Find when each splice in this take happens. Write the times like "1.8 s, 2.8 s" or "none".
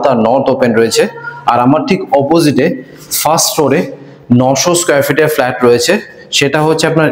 none